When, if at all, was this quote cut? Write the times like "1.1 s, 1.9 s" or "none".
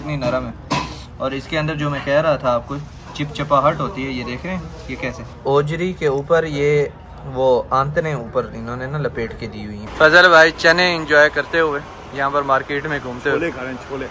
5.4 s, 9.8 s